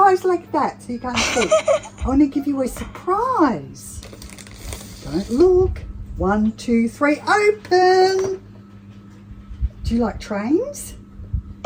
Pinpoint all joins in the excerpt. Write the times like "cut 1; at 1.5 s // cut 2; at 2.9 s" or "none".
none